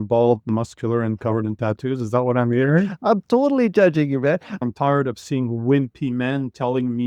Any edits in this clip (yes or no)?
yes